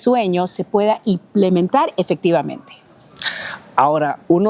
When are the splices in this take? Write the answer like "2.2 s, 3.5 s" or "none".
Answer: none